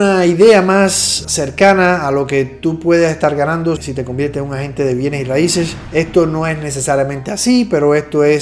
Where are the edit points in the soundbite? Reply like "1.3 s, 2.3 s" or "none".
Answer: 5.8 s